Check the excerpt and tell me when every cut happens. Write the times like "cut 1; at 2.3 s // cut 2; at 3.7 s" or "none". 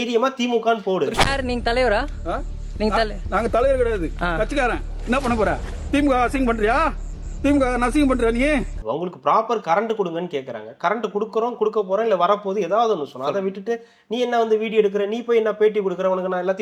cut 1; at 1.2 s // cut 2; at 8.7 s